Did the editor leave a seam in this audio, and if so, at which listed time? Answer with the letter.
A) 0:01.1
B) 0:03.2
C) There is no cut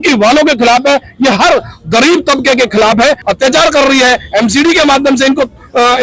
B